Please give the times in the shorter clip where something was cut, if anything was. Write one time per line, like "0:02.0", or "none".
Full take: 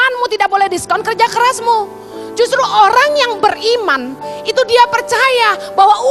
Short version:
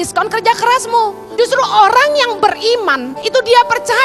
0:01.2
0:03.1